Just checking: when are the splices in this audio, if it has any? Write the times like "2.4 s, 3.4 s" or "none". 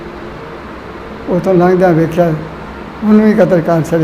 none